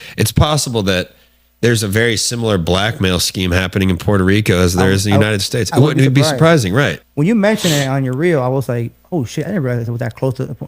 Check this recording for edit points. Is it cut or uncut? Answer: cut